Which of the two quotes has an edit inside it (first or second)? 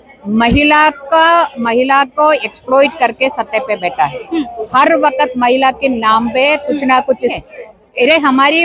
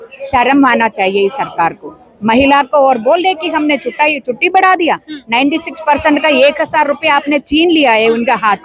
first